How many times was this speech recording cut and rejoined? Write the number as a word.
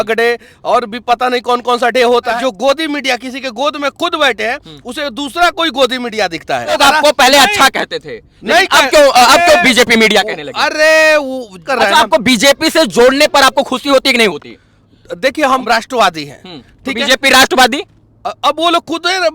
four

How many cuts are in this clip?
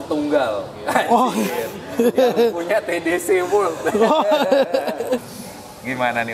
one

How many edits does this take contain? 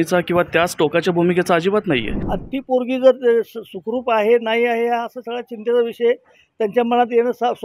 one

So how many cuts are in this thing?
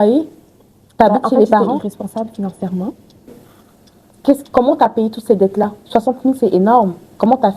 one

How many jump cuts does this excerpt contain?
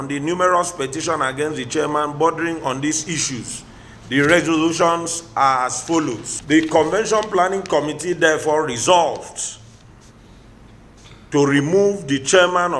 one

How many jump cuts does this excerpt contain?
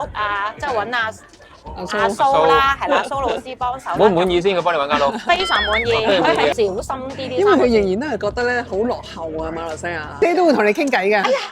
two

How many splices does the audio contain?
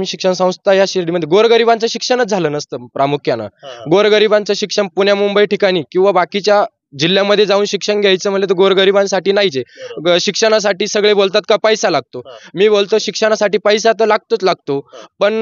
zero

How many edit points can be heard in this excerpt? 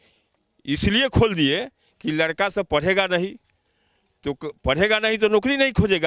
zero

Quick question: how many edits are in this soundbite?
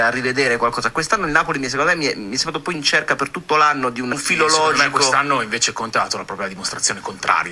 one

